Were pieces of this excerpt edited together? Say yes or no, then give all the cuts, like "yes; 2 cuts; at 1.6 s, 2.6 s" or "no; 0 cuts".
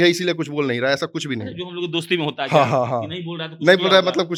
no; 0 cuts